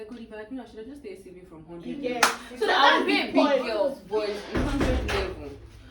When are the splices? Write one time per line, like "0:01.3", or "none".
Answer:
0:04.0